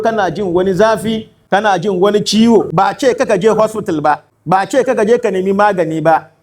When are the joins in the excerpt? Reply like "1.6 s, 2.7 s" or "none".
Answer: 1.3 s, 2.7 s, 4.3 s

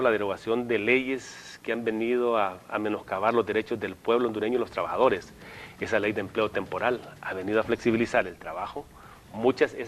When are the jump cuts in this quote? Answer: 3.5 s

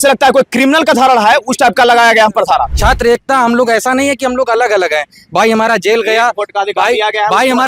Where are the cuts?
2.7 s

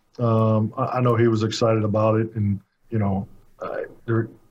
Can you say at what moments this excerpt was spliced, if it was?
2.7 s

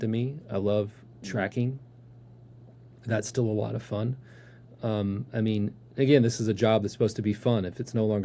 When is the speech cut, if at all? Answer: none

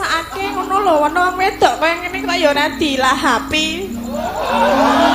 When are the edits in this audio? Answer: none

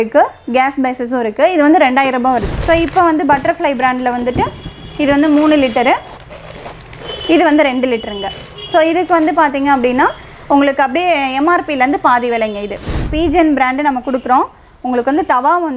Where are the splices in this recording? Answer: 2.5 s, 13.0 s

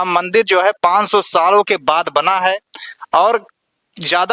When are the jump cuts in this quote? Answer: none

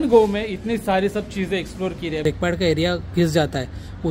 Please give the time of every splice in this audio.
2.2 s

